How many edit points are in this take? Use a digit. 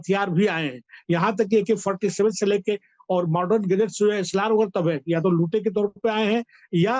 0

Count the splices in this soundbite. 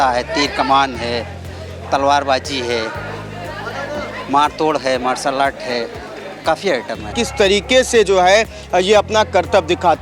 1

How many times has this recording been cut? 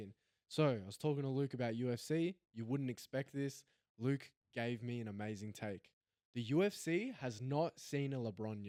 0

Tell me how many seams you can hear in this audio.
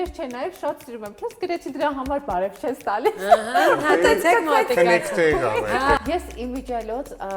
1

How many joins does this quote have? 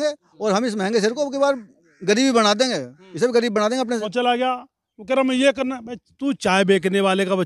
1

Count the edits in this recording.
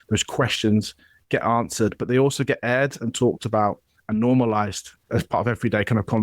1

